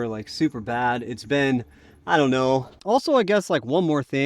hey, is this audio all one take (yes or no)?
no